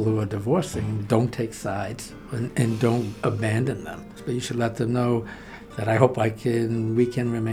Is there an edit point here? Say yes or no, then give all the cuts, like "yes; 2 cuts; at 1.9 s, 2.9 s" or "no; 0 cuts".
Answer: yes; 1 cut; at 4.1 s